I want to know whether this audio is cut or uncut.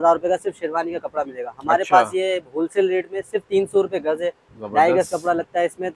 uncut